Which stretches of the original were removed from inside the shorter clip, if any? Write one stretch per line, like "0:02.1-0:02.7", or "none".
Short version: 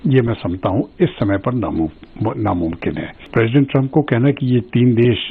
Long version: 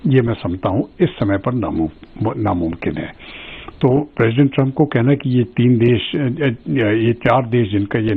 0:03.3-0:04.1